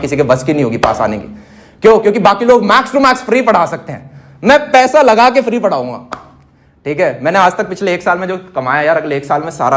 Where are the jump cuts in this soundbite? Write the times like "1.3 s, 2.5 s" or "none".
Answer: none